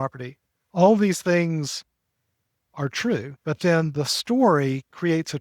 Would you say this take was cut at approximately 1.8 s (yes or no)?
no